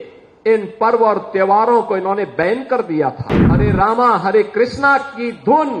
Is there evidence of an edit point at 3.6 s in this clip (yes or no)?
yes